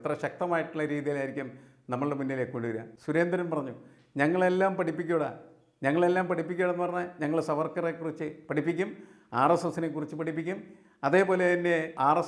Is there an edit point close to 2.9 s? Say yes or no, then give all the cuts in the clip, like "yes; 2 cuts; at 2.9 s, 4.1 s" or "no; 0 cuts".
yes; 1 cut; at 2.9 s